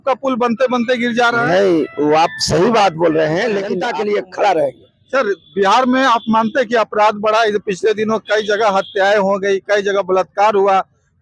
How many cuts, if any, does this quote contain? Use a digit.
1